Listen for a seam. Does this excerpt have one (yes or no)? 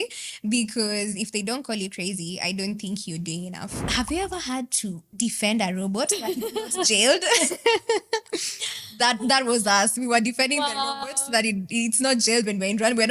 yes